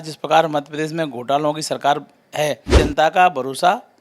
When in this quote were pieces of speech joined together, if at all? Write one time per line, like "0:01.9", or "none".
0:02.7